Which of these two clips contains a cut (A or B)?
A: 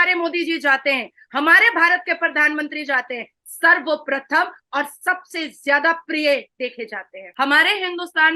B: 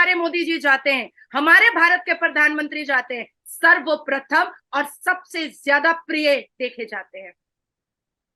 A